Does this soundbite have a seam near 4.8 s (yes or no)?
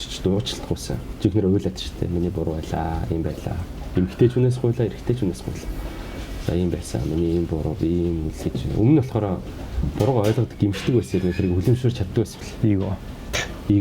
no